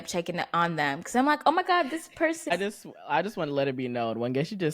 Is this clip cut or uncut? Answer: cut